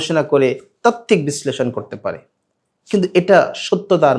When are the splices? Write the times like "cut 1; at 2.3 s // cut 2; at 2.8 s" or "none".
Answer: none